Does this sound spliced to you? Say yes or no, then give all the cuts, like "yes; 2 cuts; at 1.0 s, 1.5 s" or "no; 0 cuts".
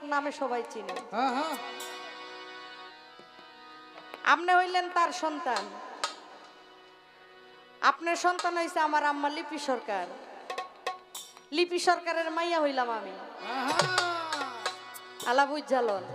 no; 0 cuts